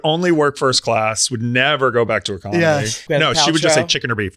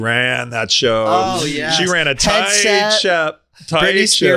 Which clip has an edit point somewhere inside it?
first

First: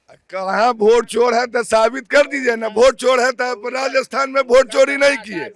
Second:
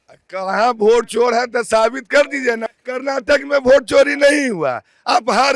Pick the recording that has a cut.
second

